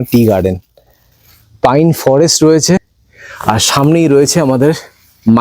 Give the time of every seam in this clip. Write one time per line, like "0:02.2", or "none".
0:02.8